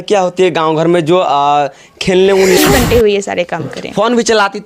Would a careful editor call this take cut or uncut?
cut